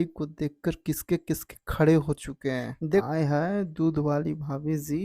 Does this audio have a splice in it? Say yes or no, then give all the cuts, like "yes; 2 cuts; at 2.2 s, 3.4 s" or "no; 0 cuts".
yes; 1 cut; at 3.1 s